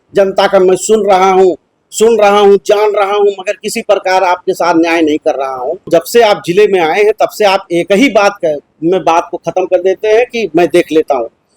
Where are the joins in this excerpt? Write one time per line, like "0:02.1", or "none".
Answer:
0:05.9